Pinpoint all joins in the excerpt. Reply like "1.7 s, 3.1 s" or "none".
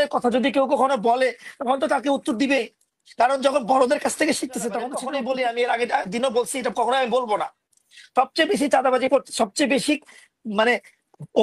5.0 s